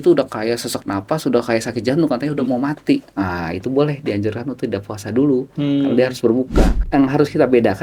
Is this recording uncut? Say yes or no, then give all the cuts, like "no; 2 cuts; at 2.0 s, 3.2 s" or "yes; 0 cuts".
no; 1 cut; at 6.7 s